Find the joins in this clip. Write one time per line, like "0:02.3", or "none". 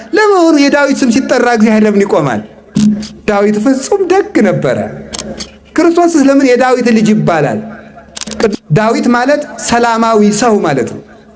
0:08.5